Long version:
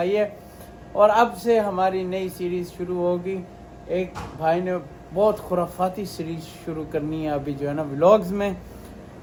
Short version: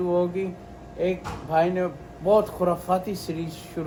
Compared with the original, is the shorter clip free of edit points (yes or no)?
yes